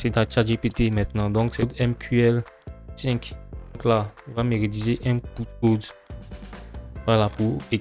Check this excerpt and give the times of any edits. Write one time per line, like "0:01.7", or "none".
0:01.7
0:03.8

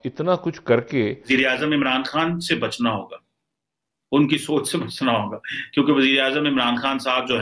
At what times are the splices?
0:01.2

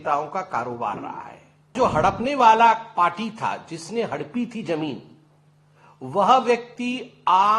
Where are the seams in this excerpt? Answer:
0:01.7

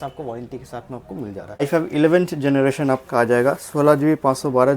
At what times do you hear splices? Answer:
0:01.6

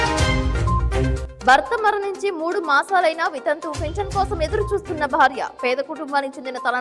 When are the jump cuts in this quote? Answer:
0:01.1

